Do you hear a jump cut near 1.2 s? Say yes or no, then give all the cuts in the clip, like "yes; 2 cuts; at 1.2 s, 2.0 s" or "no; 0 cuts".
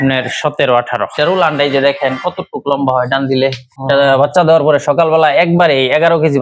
yes; 1 cut; at 1.2 s